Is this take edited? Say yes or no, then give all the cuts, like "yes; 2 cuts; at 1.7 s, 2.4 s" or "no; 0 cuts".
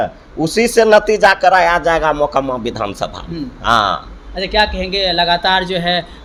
no; 0 cuts